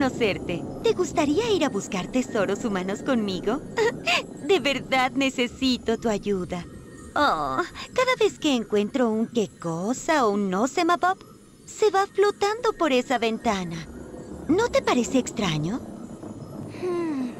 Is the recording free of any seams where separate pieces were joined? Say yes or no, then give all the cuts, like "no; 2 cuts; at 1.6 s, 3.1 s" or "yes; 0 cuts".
yes; 0 cuts